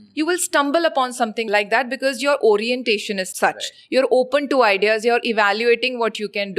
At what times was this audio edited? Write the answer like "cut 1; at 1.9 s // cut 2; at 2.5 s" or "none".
cut 1; at 1.4 s // cut 2; at 3.3 s